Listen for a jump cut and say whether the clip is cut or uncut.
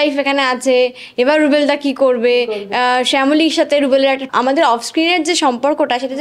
cut